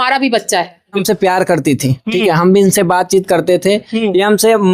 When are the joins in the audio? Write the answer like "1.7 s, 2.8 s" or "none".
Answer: 1.0 s